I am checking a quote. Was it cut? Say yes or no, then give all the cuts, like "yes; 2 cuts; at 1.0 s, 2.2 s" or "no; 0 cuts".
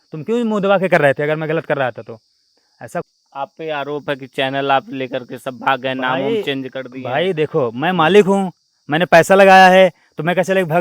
yes; 1 cut; at 3.0 s